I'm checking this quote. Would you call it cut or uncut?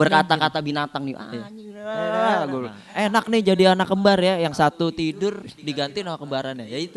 uncut